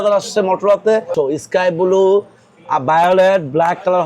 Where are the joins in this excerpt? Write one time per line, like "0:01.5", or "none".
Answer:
0:01.1